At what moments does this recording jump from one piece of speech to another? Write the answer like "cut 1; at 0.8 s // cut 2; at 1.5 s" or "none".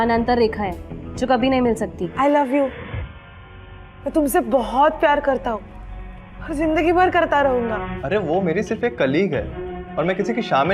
cut 1; at 2.0 s // cut 2; at 7.9 s

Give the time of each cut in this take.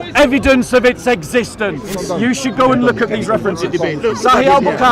cut 1; at 1.9 s

